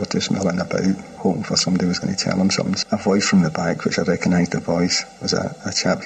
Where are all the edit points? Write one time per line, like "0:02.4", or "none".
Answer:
0:01.1
0:02.8